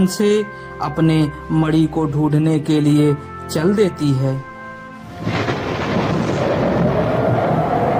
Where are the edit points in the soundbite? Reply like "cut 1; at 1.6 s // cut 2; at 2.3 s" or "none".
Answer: none